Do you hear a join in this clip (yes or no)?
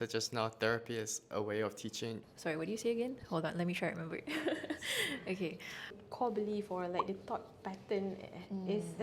yes